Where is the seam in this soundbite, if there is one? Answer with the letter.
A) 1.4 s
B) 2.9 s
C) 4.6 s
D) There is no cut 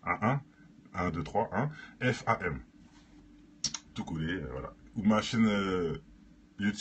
D